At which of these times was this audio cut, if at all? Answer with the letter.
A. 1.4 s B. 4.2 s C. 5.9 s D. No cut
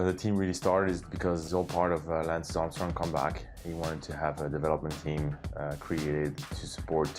A